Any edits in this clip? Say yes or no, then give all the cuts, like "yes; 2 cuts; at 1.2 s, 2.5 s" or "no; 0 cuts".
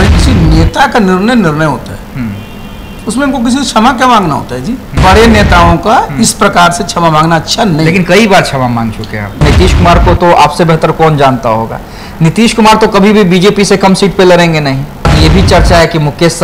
yes; 3 cuts; at 4.8 s, 9.4 s, 15.1 s